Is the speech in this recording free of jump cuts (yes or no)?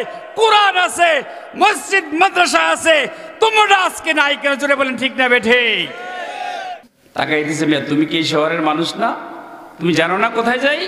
no